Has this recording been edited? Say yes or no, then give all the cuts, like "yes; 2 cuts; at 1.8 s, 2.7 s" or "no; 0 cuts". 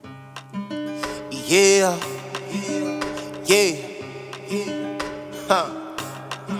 yes; 1 cut; at 1.1 s